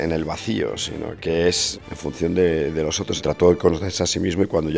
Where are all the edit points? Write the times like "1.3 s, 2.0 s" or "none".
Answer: 1.7 s, 3.2 s